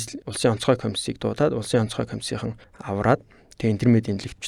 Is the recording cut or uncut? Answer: uncut